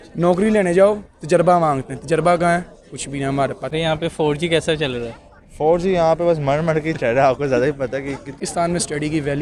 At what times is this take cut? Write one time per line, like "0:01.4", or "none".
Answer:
0:03.7
0:08.4